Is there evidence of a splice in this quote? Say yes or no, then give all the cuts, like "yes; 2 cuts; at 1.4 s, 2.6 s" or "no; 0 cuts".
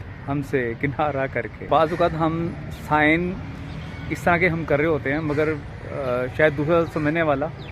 yes; 1 cut; at 1.6 s